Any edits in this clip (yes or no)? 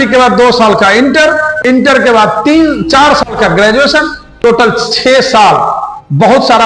no